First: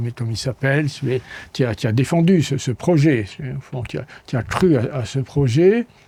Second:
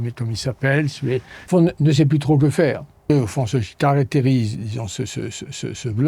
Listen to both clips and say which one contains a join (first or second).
second